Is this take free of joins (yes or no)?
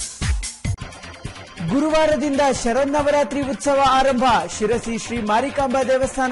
no